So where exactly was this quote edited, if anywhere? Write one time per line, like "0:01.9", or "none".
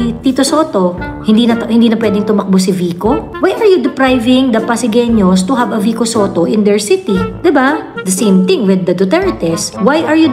none